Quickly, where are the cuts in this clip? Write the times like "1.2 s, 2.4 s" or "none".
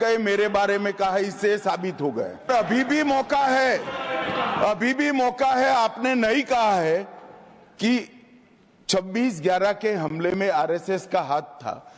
2.5 s